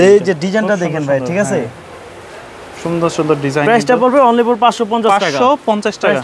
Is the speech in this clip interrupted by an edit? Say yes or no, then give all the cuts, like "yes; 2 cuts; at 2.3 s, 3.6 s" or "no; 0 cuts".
no; 0 cuts